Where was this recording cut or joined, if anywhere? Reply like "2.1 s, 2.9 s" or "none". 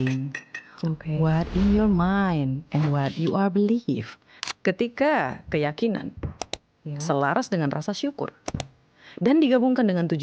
4.5 s